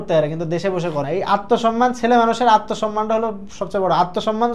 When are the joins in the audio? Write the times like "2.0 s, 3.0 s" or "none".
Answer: 1.0 s